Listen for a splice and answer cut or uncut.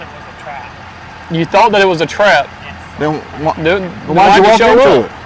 uncut